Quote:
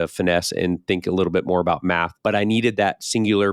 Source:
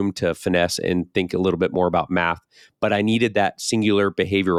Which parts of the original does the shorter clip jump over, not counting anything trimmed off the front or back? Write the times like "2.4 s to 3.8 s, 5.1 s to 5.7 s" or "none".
2.4 s to 2.7 s